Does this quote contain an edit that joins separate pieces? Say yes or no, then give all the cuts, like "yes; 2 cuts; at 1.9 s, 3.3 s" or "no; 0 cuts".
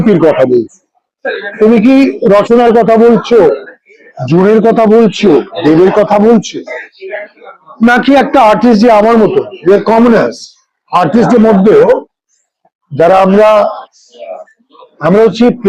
no; 0 cuts